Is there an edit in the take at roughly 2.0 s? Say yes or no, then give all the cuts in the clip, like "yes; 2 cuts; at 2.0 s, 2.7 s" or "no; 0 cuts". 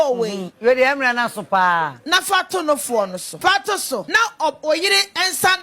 no; 2 cuts; at 3.3 s, 4.1 s